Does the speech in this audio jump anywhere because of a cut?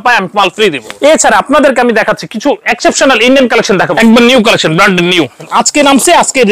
yes; 3 cuts; at 0.9 s, 3.9 s, 5.4 s

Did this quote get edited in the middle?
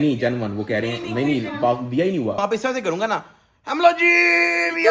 yes; 1 cut; at 2.4 s

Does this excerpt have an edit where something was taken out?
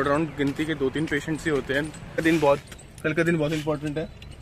yes; 1 cut; at 2.2 s

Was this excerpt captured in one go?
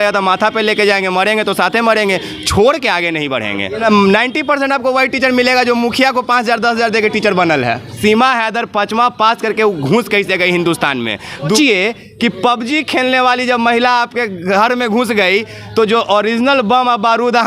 no; 3 cuts; at 3.8 s, 8.0 s, 11.6 s

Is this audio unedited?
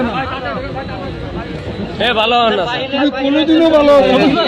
yes; 0 cuts

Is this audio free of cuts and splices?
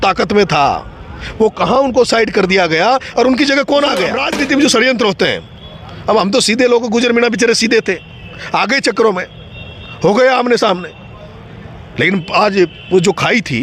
no; 1 cut; at 4.2 s

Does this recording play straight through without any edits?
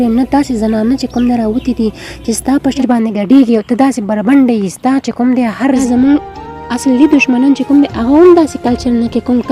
no; 2 cuts; at 2.8 s, 5.8 s

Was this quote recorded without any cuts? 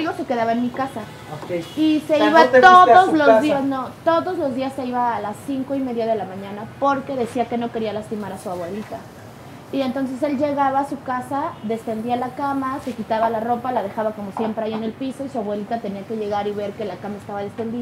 yes; 0 cuts

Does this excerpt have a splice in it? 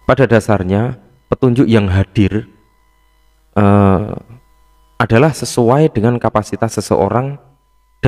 no; 0 cuts

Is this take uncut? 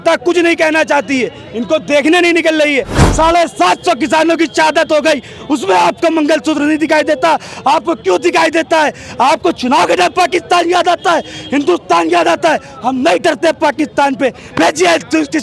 no; 1 cut; at 2.9 s

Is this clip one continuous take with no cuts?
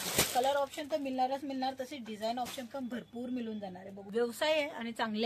no; 1 cut; at 4.0 s

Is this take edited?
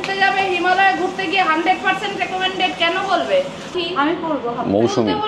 yes; 1 cut; at 3.7 s

